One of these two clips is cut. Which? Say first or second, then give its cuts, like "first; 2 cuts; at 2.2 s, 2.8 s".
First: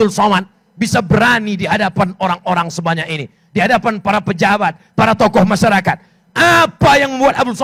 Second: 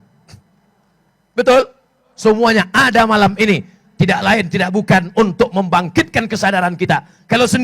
second; 1 cut; at 2.1 s